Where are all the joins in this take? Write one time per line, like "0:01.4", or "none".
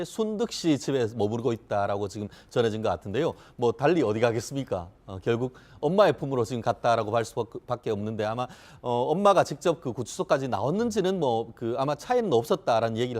0:02.8

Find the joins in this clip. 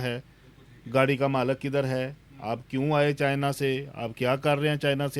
none

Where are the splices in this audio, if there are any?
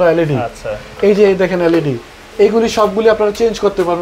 none

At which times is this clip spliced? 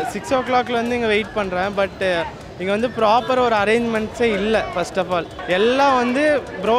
0:05.3

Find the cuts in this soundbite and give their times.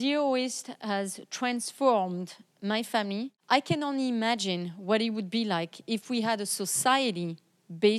0:03.3

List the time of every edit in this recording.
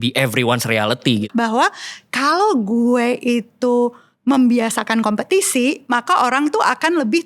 0:01.2

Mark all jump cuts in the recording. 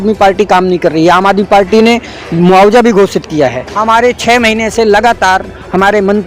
0:03.7

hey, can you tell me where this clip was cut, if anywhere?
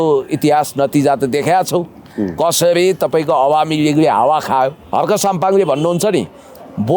0:04.8

